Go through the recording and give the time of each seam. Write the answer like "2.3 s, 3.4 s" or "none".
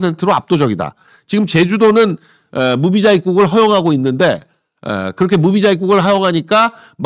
none

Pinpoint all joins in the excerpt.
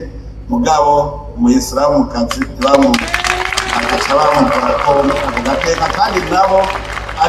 none

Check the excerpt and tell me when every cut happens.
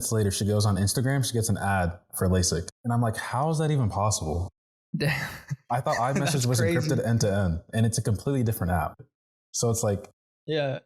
2.7 s

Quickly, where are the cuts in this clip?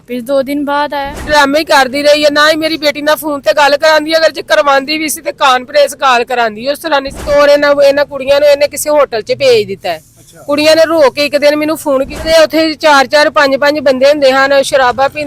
1.2 s, 7.2 s, 12.2 s

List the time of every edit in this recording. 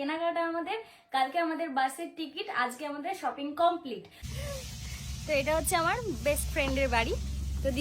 4.1 s

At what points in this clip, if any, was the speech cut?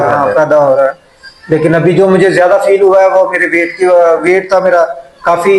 none

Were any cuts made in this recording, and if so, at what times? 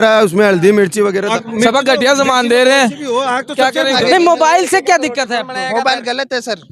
1.3 s, 4.0 s

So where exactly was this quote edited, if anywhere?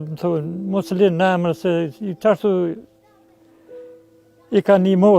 3.2 s, 4.3 s

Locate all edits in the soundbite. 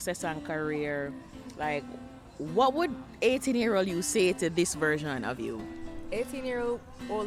none

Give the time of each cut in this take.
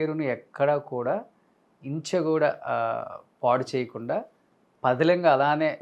none

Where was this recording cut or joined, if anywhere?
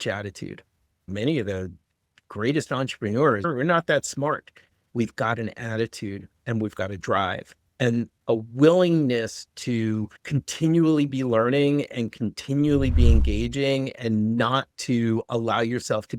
1.0 s, 3.5 s, 4.9 s, 8.1 s, 10.2 s

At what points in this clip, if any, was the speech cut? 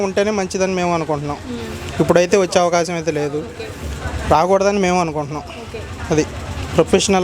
none

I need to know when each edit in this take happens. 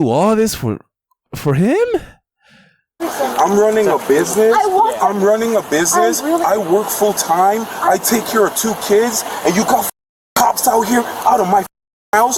1.3 s, 3.0 s

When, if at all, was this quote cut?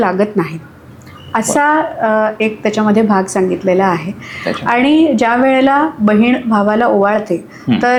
none

